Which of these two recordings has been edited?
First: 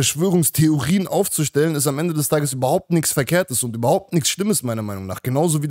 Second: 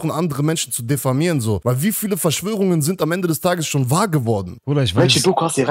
second; 2 cuts; at 1.6 s, 4.5 s

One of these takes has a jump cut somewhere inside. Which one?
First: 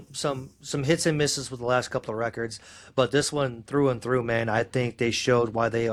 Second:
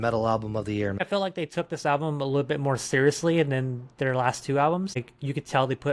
second; 2 cuts; at 1.0 s, 5.0 s

